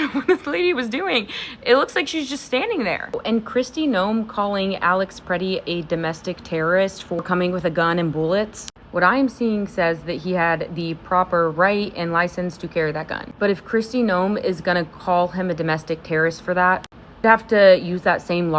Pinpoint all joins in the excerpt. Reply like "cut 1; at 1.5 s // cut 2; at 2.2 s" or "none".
cut 1; at 3.1 s // cut 2; at 13.2 s